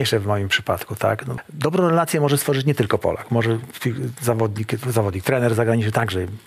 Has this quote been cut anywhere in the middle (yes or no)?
yes